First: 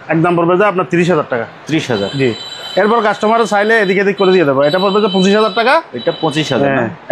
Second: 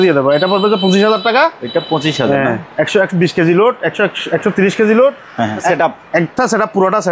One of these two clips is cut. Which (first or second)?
second